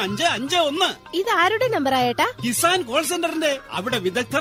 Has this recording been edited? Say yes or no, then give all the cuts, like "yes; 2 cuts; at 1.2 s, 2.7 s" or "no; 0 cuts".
no; 0 cuts